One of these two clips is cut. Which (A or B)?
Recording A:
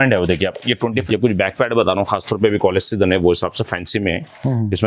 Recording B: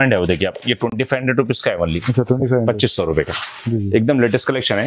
A